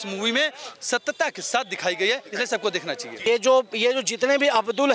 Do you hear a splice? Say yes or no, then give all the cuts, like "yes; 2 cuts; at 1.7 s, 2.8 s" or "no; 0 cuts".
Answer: yes; 1 cut; at 3.0 s